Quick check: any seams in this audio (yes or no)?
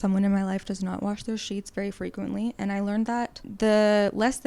yes